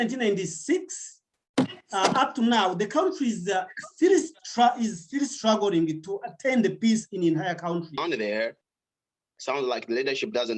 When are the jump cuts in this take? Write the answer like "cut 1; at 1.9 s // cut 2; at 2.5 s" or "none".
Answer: cut 1; at 8.0 s

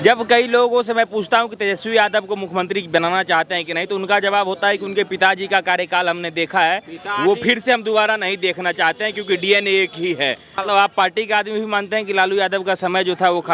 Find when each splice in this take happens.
cut 1; at 10.6 s

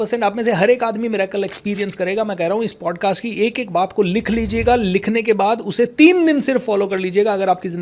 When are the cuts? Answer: none

